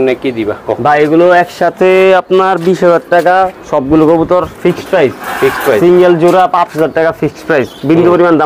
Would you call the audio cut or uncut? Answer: uncut